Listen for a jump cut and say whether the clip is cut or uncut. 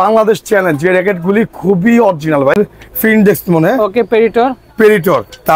cut